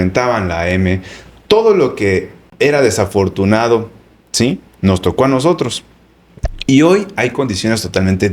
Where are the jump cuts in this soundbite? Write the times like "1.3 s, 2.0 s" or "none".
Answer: none